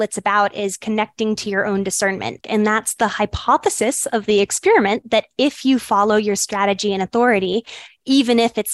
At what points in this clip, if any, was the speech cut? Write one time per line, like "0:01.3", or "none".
0:02.4